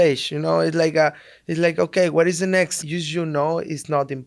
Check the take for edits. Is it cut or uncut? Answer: cut